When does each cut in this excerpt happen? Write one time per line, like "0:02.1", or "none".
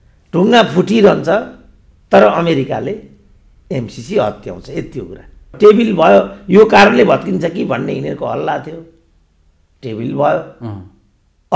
0:05.6